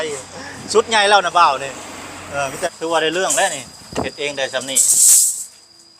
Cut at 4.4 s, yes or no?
no